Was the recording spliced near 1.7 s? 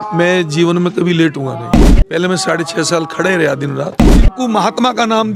yes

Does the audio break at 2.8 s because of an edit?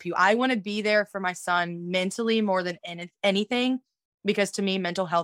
no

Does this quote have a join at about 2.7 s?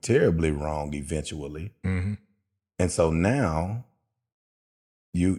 no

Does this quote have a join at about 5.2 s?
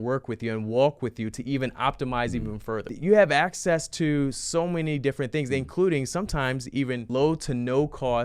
no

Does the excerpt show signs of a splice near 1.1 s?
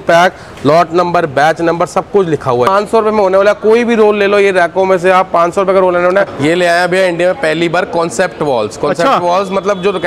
no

